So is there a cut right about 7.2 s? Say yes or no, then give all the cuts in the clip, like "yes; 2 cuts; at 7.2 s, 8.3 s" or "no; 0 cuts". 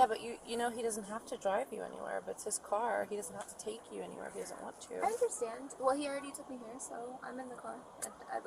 yes; 1 cut; at 7.2 s